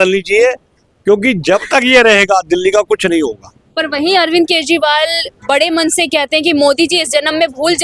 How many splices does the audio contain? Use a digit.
0